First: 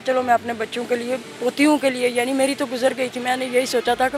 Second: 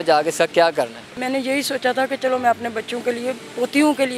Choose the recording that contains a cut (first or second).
second